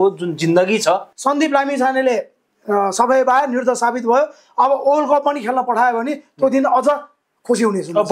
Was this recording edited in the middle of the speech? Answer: yes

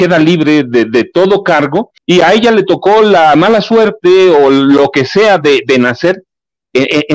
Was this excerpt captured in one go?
no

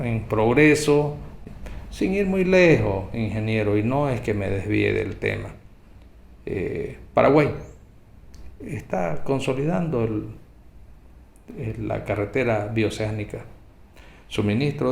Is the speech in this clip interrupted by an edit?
no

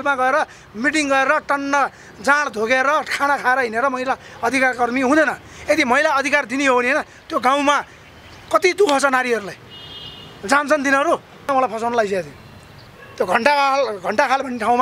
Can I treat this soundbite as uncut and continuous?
no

